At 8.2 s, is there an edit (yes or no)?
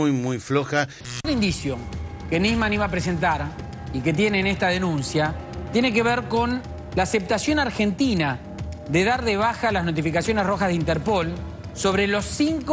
no